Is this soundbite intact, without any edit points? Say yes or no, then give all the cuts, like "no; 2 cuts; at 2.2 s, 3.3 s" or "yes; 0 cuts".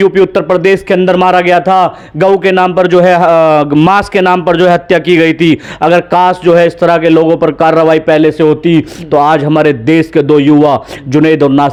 yes; 0 cuts